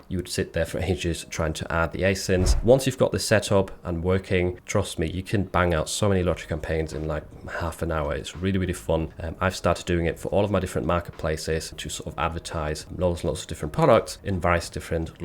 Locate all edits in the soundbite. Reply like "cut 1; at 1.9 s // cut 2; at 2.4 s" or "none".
cut 1; at 2.5 s // cut 2; at 14.2 s